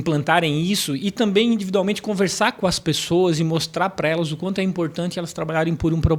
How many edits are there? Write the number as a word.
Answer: zero